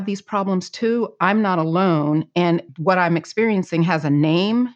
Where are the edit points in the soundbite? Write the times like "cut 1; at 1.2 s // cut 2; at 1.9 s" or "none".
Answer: cut 1; at 2.7 s